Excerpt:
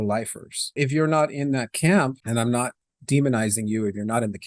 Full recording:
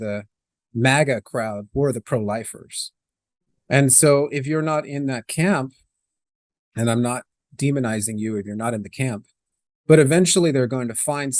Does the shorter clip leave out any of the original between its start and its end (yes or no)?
yes